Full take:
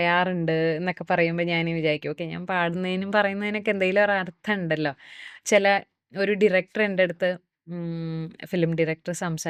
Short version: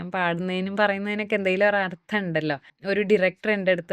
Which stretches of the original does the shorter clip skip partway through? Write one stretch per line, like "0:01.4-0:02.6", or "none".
0:05.0-0:06.0